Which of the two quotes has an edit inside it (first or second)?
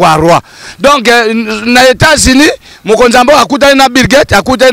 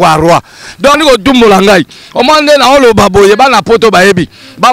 second